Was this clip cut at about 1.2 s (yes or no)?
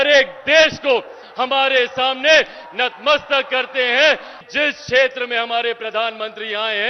no